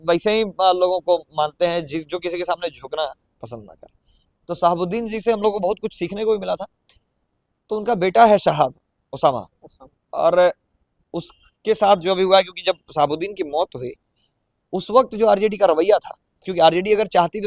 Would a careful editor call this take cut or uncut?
uncut